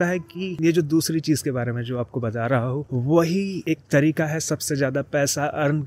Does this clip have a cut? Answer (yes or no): no